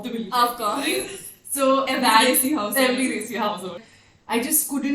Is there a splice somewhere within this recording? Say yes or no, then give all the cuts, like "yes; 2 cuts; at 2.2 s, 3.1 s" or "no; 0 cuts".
yes; 1 cut; at 3.8 s